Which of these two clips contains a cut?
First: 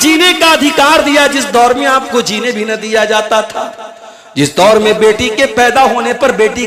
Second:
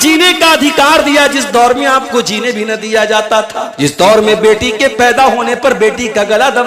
second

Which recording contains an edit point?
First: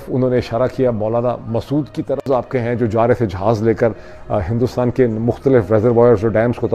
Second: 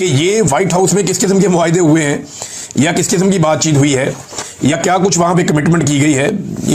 first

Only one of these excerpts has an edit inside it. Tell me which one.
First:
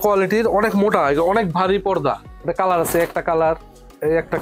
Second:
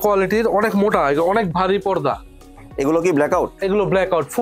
first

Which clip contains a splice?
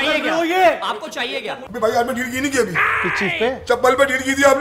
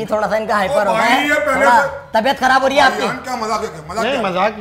first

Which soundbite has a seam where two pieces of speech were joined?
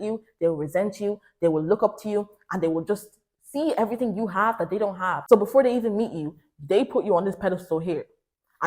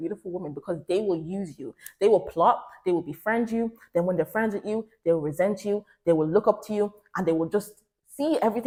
first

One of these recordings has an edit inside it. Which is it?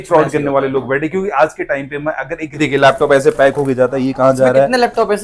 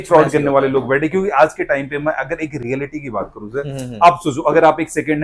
first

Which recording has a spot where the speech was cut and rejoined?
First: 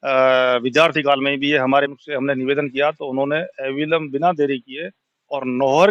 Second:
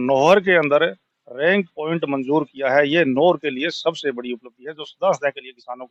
first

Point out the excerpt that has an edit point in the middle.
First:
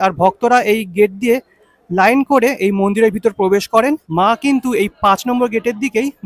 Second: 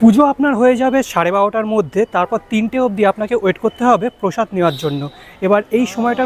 first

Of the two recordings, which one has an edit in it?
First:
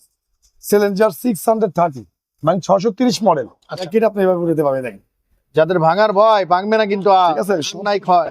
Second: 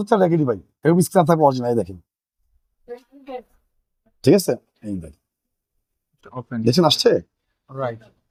first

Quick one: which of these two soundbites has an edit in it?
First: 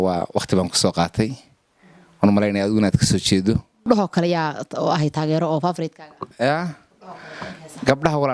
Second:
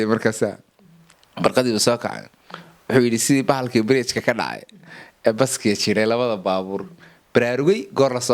first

